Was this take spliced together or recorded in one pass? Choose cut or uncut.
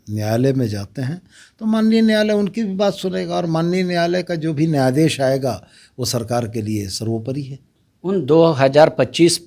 uncut